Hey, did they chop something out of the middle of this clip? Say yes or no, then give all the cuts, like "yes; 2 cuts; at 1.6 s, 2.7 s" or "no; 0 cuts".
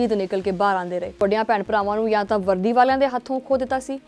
yes; 1 cut; at 1.2 s